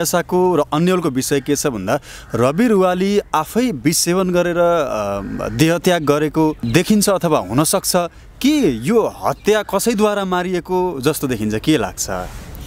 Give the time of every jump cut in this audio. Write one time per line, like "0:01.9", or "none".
none